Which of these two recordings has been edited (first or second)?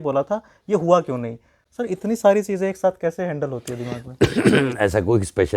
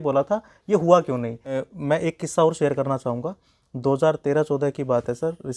second